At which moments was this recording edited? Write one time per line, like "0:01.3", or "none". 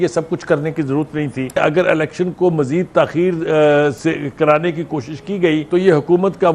0:01.6
0:05.7